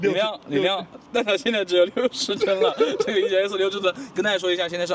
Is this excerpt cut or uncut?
uncut